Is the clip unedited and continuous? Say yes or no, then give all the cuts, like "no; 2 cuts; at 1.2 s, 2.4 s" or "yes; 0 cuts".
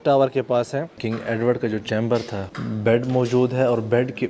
no; 2 cuts; at 1.0 s, 2.4 s